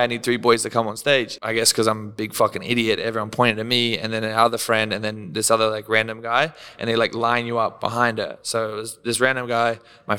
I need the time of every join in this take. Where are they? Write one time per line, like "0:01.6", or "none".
0:01.4